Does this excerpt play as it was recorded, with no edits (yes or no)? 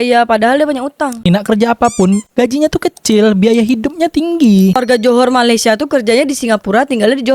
no